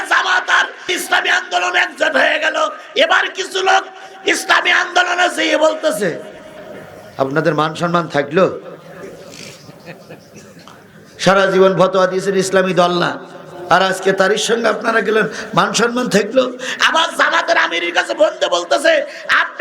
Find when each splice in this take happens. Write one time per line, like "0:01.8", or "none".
0:00.9